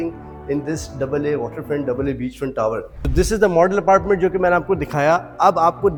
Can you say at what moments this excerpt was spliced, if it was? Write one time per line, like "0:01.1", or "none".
none